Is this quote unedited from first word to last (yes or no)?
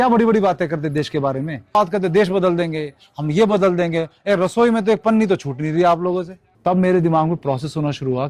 no